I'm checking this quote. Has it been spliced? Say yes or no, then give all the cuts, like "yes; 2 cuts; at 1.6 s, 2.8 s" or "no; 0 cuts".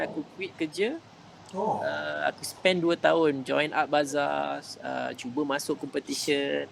no; 0 cuts